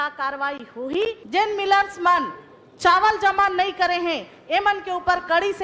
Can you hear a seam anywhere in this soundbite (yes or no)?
yes